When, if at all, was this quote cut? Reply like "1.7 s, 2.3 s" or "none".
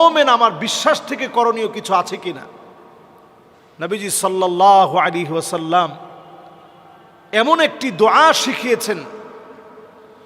none